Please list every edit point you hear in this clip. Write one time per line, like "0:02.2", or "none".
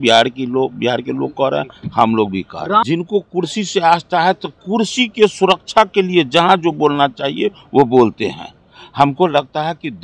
0:02.9